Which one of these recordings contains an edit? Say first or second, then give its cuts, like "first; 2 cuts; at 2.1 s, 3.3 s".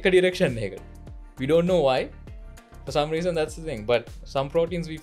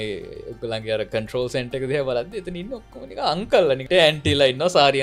second; 1 cut; at 3.9 s